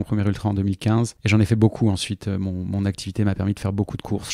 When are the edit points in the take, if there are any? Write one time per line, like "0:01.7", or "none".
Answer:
0:01.2